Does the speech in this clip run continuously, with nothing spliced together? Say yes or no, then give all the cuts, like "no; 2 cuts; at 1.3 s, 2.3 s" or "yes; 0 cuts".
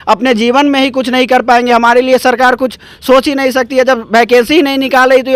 yes; 0 cuts